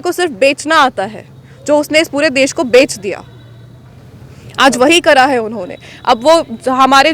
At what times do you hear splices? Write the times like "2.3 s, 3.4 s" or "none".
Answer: none